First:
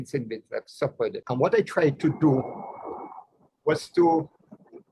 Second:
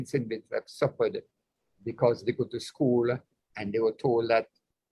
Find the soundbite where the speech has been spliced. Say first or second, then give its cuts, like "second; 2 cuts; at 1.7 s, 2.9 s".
first; 1 cut; at 1.2 s